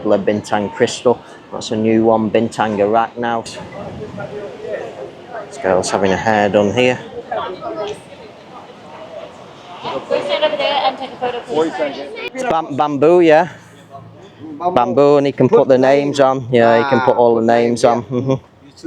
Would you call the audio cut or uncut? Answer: cut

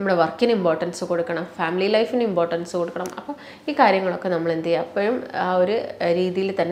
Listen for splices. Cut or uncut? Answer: uncut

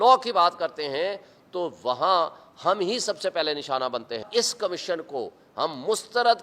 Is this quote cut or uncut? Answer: cut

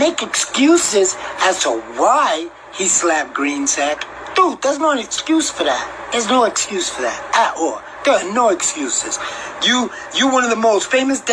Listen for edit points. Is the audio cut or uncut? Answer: cut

